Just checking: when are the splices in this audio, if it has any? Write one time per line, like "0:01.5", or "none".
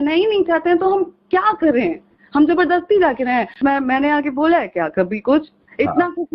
0:03.6